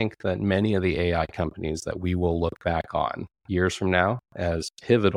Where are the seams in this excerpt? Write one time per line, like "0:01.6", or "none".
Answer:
none